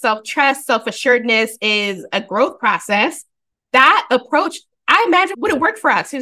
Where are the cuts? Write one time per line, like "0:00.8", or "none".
0:05.3